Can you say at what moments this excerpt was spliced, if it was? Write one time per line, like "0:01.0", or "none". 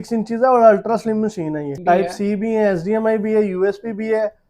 0:01.8